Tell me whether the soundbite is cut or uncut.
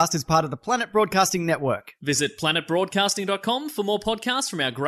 uncut